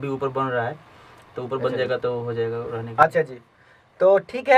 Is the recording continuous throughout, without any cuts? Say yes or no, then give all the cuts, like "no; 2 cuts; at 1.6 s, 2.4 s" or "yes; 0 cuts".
yes; 0 cuts